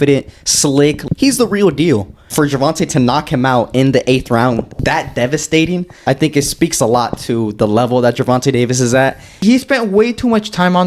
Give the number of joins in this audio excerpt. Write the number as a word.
five